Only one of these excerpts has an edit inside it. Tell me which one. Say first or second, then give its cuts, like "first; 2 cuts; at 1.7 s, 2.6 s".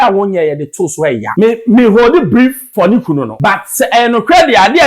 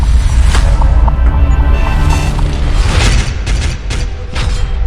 first; 3 cuts; at 1.3 s, 2.6 s, 3.3 s